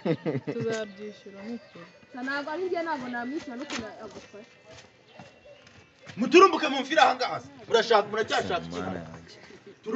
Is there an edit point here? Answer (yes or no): no